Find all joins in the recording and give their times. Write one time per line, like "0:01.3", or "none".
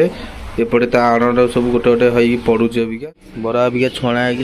0:03.0